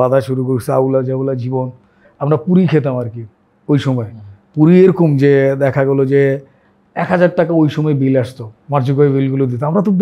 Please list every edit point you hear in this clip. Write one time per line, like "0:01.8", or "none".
0:02.1